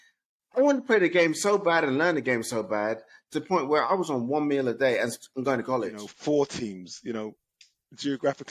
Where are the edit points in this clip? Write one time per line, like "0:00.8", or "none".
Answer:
0:06.0